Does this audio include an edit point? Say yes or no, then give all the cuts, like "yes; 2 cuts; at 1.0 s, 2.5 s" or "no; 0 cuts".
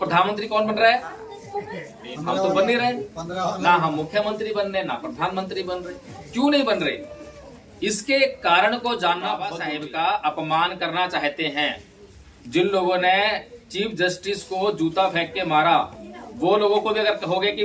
yes; 1 cut; at 9.6 s